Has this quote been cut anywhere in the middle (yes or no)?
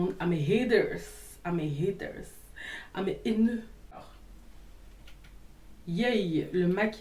yes